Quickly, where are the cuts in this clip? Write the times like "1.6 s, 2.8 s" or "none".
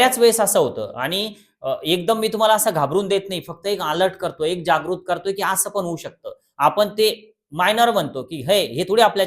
none